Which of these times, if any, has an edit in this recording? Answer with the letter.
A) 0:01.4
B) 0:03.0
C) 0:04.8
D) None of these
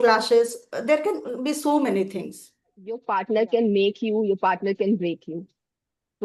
B